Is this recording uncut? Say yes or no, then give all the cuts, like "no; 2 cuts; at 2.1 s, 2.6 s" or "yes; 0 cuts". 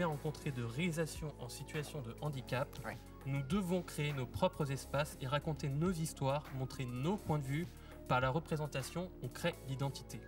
yes; 0 cuts